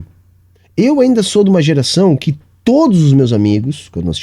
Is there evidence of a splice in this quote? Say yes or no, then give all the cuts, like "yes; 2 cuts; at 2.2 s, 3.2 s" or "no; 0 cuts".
no; 0 cuts